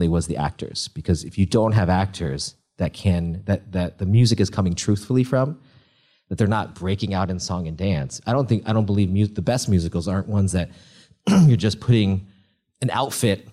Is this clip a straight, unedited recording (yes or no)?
yes